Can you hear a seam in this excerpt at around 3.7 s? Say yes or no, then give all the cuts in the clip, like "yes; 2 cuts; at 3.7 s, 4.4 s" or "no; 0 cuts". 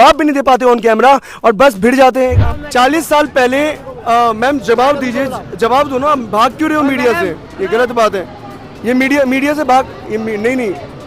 no; 1 cut; at 2.4 s